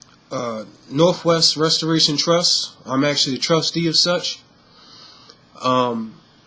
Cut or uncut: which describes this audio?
cut